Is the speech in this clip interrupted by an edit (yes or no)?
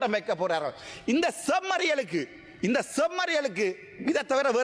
no